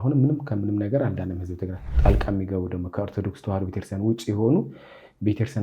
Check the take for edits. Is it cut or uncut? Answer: cut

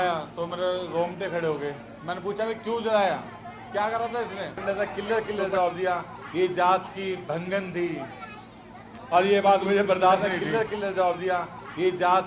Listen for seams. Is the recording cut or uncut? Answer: cut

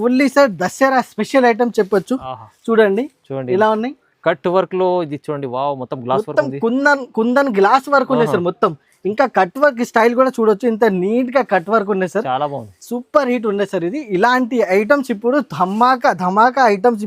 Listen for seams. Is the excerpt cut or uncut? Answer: uncut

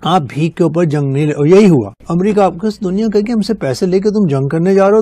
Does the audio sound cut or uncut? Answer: uncut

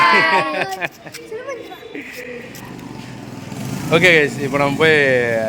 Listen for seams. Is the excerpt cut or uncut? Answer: uncut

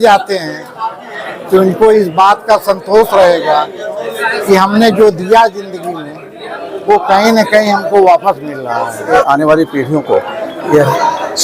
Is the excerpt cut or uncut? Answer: cut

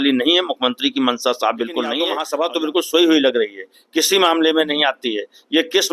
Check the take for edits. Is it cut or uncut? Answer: cut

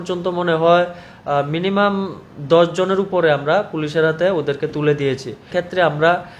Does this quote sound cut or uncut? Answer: cut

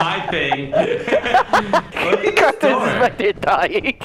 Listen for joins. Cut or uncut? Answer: cut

